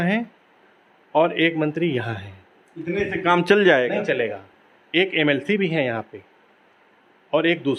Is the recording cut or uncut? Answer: uncut